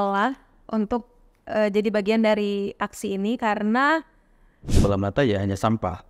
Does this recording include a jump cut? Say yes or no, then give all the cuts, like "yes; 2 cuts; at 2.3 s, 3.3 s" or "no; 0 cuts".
yes; 1 cut; at 4.7 s